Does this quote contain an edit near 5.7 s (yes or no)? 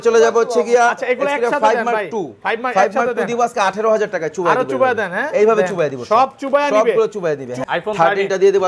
no